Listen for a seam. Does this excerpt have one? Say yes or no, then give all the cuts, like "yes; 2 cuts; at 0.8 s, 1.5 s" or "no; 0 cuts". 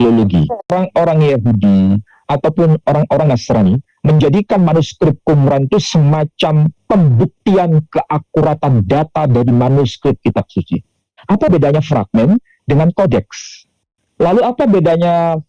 yes; 2 cuts; at 0.7 s, 11.1 s